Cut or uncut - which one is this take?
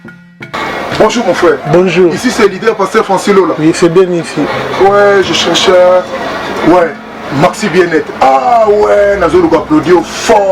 uncut